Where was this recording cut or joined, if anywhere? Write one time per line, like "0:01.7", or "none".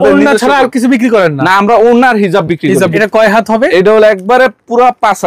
0:03.0